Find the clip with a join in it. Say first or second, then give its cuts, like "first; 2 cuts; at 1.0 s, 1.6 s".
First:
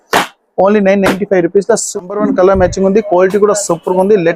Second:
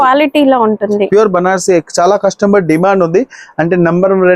first; 1 cut; at 2.1 s